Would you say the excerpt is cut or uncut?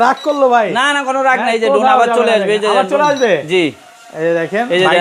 uncut